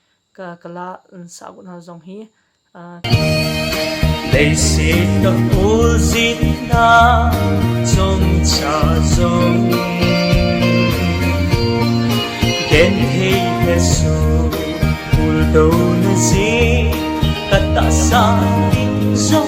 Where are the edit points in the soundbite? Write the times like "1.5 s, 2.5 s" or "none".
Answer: 3.1 s